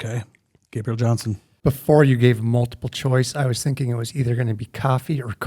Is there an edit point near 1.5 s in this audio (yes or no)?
yes